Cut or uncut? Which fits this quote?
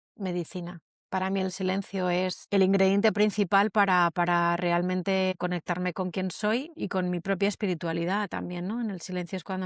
uncut